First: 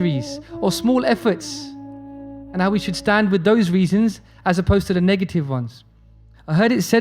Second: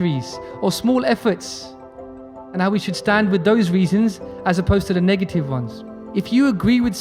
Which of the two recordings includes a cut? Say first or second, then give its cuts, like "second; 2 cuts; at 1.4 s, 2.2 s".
second; 1 cut; at 6.0 s